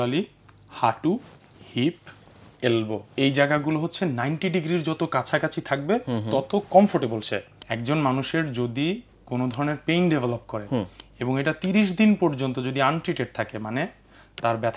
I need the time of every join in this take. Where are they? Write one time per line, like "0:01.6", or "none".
0:03.1
0:07.6